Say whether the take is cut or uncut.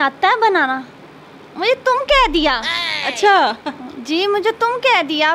uncut